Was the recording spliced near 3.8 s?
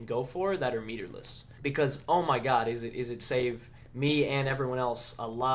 no; 1 cut; at 1.5 s

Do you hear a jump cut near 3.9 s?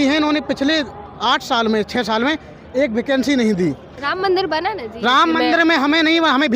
yes; 1 cut; at 3.9 s

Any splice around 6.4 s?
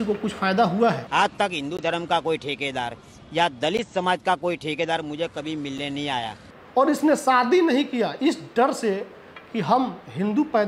yes; 2 cuts; at 1.0 s, 6.4 s

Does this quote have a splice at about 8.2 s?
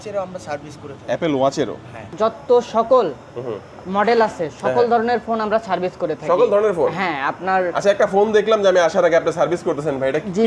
no; 1 cut; at 2.1 s

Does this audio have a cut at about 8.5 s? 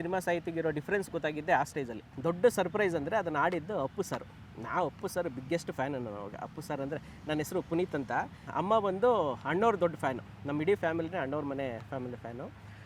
yes; 2 cuts; at 2.1 s, 8.5 s

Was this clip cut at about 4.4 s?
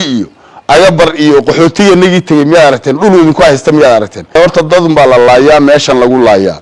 yes; 1 cut; at 4.4 s

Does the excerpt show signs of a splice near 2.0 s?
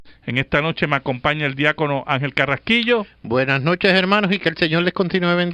yes; 1 cut; at 2.0 s

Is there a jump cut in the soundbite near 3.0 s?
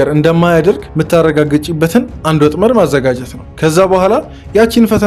no; 0 cuts

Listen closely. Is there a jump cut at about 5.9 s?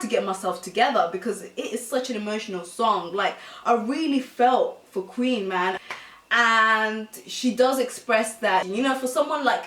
yes; 1 cut; at 5.9 s

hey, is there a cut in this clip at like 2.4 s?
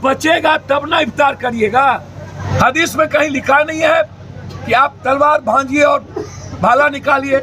yes; 1 cut; at 2.4 s

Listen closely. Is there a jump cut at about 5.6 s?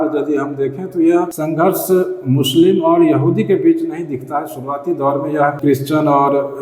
yes; 2 cuts; at 1.3 s, 5.6 s

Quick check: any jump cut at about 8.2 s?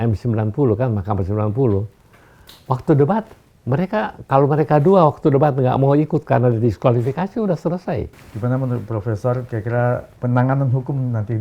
yes; 1 cut; at 8.2 s

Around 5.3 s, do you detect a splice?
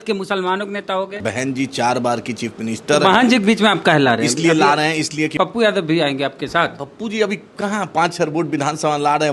yes; 2 cuts; at 1.2 s, 5.3 s

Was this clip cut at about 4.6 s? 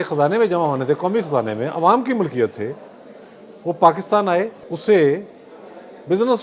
yes; 1 cut; at 4.6 s

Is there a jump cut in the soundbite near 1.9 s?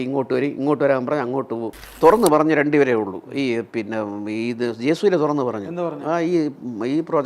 yes; 1 cut; at 1.9 s

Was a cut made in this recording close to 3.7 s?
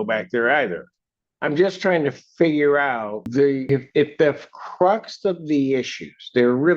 yes; 1 cut; at 3.7 s

